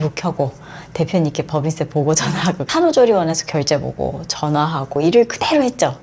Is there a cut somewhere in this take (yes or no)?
yes